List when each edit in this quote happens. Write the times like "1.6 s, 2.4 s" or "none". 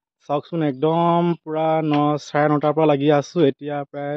none